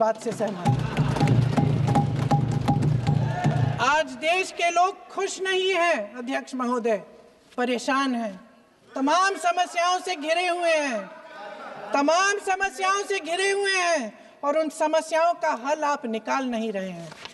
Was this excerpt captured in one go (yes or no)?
yes